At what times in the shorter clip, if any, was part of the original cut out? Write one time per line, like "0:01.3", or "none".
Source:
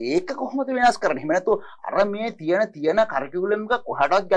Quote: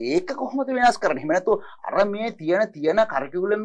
none

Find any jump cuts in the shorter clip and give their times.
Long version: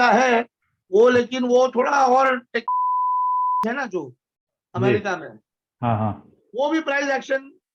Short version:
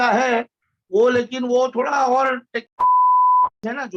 none

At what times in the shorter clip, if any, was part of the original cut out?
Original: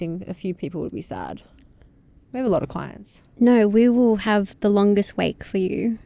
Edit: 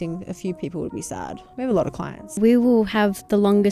0:01.4
0:02.4

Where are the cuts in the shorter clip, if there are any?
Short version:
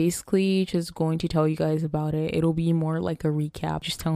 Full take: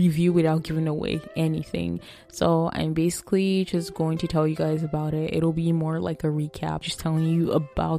none

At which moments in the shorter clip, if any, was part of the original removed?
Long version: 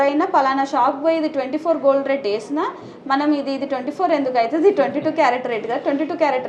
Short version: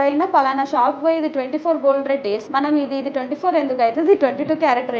0:02.5

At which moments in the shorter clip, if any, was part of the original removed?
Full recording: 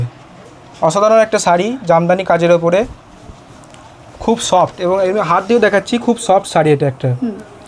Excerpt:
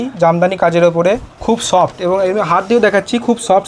0:01.3

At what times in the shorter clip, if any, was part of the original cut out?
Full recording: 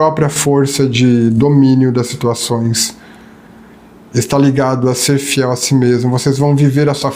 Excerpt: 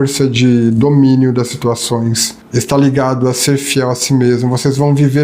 0:02.3

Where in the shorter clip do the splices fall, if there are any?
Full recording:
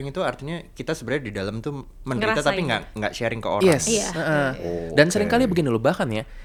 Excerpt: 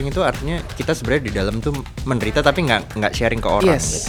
none

